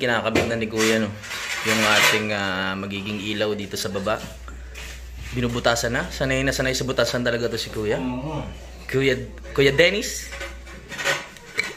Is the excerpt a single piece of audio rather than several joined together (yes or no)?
yes